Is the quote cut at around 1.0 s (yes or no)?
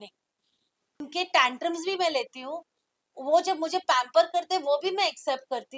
yes